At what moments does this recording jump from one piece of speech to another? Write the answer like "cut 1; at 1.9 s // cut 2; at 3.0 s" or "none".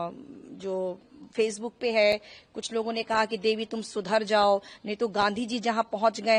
none